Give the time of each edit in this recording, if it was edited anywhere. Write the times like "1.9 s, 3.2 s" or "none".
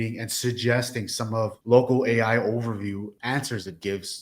1.6 s, 3.1 s